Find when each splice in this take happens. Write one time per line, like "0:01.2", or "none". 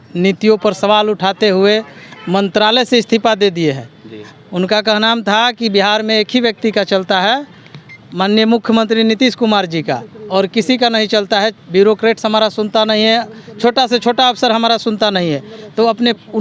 none